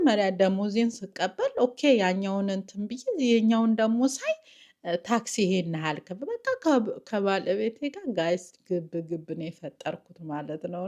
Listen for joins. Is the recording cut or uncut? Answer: uncut